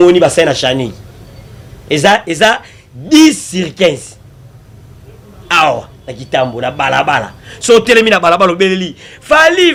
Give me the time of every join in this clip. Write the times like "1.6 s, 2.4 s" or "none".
none